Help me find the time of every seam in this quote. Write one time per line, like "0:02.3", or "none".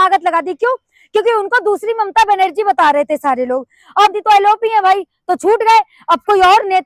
0:04.1